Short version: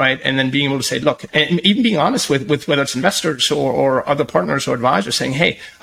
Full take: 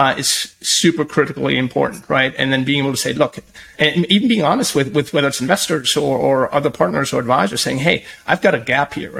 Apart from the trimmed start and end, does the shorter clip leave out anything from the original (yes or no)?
yes